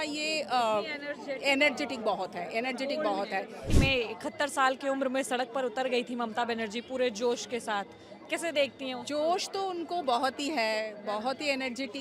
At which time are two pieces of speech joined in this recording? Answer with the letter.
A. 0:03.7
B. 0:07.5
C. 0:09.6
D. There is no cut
A